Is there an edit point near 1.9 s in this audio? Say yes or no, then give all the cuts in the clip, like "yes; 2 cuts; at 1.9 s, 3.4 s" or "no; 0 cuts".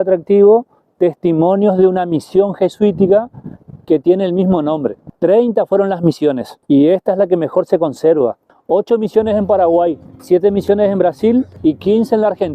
no; 5 cuts; at 5.0 s, 6.5 s, 8.5 s, 10.1 s, 11.5 s